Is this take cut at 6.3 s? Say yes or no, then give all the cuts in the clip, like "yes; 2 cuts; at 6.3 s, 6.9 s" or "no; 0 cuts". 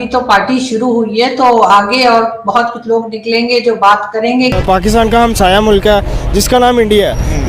no; 1 cut; at 4.6 s